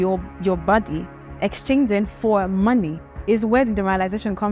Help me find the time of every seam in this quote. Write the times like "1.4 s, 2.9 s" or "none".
none